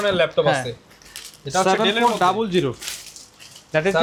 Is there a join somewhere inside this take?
no; 0 cuts

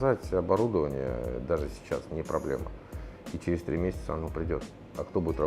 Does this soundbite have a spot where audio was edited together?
no; 0 cuts

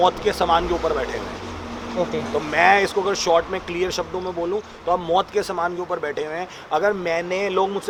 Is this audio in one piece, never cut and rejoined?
yes; 0 cuts

